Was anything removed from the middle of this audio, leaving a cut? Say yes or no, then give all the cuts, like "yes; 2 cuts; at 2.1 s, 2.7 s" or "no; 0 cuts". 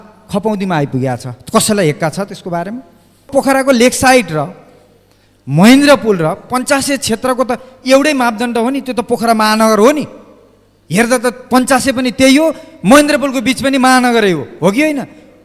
yes; 1 cut; at 3.3 s